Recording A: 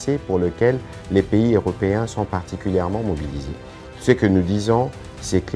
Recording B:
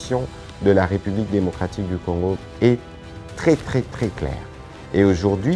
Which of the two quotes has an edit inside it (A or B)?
B